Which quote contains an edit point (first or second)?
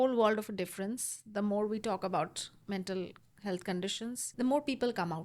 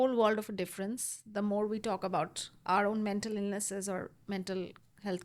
first